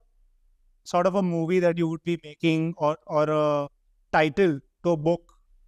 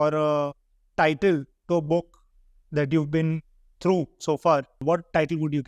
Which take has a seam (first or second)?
second